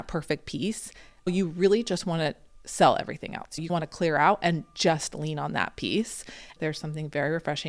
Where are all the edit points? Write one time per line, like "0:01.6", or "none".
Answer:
0:01.3
0:03.6
0:06.5